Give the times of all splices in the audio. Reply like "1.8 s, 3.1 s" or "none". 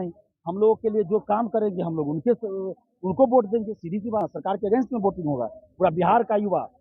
4.3 s